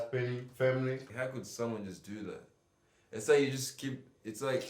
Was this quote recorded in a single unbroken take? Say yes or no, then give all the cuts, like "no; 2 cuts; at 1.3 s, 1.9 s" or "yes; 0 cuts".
no; 1 cut; at 1.1 s